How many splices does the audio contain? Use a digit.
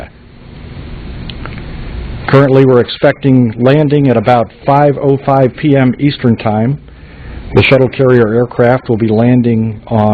1